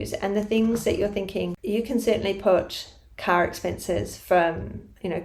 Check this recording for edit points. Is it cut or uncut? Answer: cut